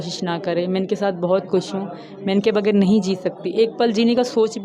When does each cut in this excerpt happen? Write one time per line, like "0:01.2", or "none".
none